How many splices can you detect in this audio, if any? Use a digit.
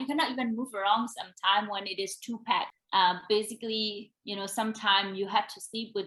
0